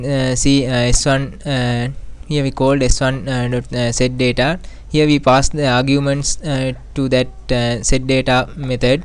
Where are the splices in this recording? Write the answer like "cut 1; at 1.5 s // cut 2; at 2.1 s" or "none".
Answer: none